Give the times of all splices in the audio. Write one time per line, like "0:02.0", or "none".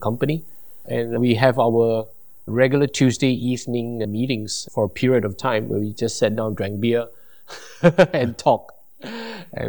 none